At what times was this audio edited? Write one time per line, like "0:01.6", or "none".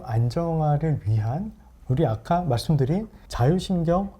0:03.2